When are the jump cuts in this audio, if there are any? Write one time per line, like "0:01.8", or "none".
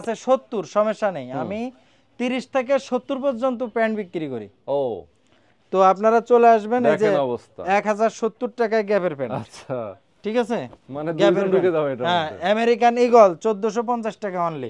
none